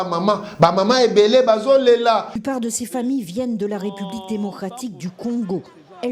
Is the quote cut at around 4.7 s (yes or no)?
no